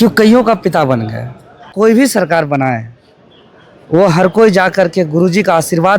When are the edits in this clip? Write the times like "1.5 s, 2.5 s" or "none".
1.7 s

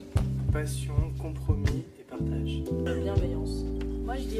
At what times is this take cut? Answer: none

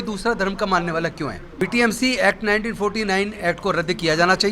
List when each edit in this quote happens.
1.4 s

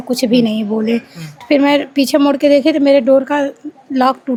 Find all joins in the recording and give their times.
none

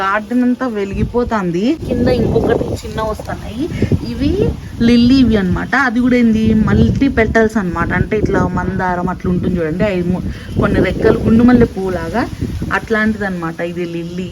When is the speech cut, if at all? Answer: 1.8 s

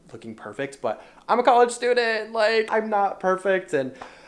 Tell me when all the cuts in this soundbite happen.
2.7 s

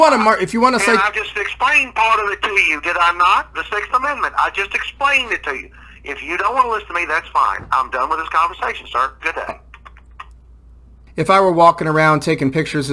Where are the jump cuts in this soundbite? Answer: 11.0 s

